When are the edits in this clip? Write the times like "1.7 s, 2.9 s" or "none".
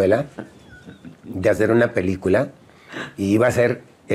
none